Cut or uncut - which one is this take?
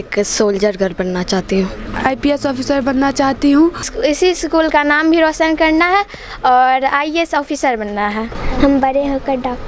cut